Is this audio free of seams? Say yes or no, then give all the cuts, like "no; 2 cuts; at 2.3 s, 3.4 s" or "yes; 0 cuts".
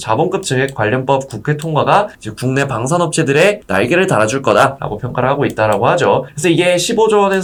yes; 0 cuts